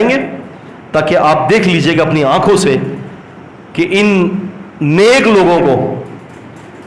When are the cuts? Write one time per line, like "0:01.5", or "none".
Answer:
none